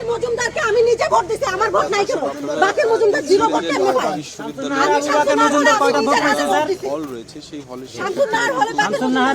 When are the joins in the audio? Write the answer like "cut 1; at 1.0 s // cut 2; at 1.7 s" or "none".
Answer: none